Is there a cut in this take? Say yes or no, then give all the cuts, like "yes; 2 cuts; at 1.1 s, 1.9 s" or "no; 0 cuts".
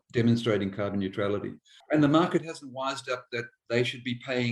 yes; 1 cut; at 1.7 s